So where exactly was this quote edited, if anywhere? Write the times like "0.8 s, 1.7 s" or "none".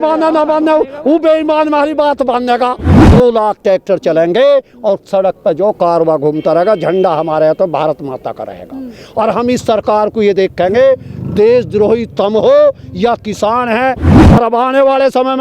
2.9 s, 14.1 s